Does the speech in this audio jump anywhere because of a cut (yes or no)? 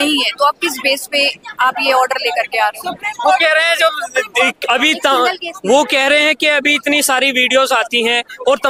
no